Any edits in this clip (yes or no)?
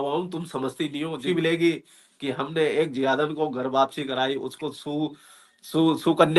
yes